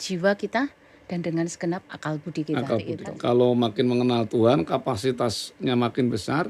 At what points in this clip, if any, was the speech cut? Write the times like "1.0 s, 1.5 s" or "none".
3.0 s